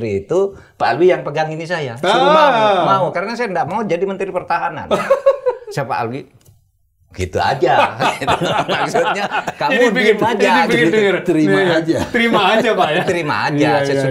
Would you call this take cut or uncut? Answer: uncut